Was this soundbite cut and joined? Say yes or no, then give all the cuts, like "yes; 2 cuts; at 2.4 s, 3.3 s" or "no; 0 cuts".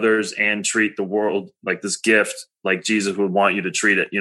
no; 0 cuts